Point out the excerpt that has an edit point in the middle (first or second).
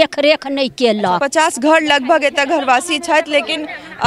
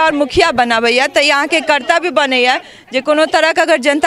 first